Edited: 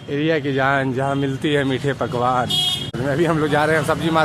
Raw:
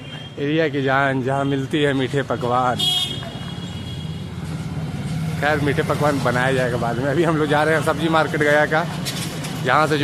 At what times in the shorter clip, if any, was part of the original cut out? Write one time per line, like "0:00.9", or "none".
0:03.0

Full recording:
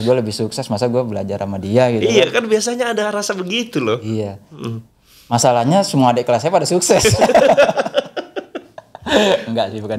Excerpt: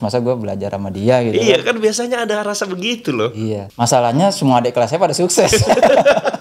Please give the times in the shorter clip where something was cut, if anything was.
0:03.7

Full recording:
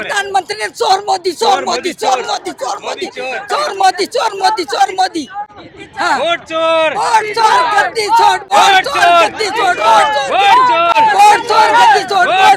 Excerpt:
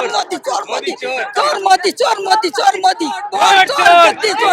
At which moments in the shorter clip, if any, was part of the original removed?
0:03.3

